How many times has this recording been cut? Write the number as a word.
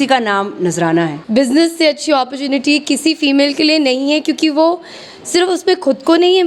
one